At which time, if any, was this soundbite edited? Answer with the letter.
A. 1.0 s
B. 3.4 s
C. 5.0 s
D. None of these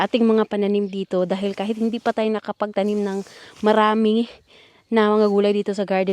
D